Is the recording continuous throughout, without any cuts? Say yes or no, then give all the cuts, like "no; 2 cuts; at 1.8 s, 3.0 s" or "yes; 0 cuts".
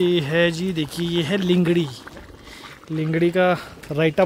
yes; 0 cuts